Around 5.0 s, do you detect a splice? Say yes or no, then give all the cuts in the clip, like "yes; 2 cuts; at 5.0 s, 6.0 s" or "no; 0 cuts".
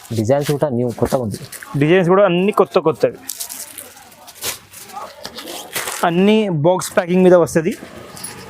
yes; 1 cut; at 5.0 s